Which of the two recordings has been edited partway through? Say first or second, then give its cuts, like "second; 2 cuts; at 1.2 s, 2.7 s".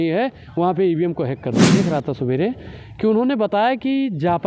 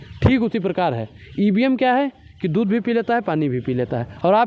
first; 1 cut; at 1.7 s